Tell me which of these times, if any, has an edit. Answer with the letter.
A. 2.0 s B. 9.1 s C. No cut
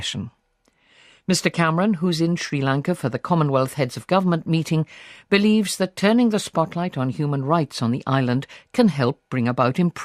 A